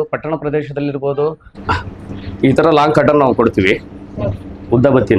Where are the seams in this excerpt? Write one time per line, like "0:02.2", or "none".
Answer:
0:01.5